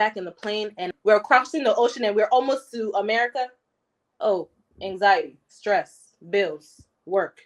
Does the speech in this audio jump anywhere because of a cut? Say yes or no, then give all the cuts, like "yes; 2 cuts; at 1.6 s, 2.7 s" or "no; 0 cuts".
yes; 1 cut; at 0.9 s